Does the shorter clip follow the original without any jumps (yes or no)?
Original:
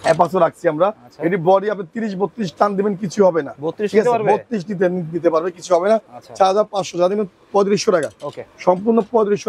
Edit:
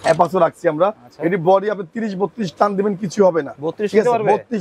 yes